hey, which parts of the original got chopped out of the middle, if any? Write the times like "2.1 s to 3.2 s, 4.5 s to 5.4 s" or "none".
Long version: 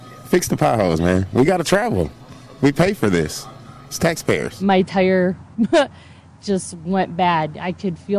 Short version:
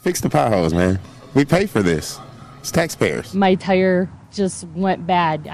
1.3 s to 2.3 s, 5.4 s to 6.3 s